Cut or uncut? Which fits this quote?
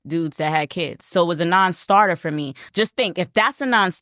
cut